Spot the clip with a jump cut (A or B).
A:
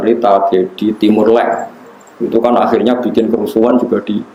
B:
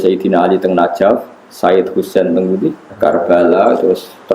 B